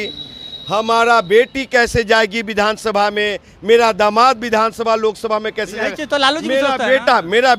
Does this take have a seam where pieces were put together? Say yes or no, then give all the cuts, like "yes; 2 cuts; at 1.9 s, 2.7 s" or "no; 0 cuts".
no; 0 cuts